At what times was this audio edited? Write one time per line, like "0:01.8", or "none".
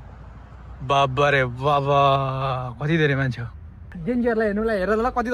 0:03.9